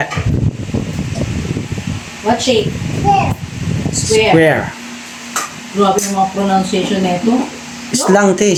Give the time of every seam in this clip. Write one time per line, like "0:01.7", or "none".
none